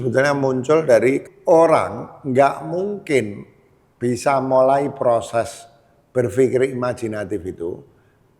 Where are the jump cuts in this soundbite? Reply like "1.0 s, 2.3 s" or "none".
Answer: 1.2 s